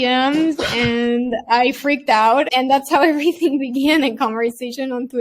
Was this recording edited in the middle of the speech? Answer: yes; 1 cut; at 2.5 s

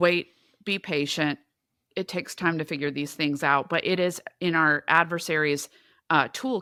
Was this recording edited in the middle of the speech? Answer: no; 0 cuts

